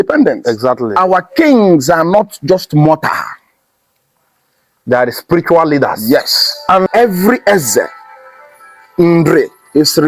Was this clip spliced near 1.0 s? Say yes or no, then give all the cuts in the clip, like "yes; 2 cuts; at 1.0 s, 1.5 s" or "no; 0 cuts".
yes; 2 cuts; at 1.0 s, 6.9 s